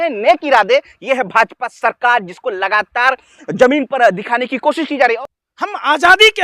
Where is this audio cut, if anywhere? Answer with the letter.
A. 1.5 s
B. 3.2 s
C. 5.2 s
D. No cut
C